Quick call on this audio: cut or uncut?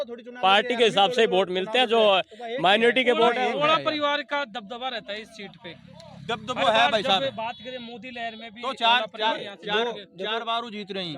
uncut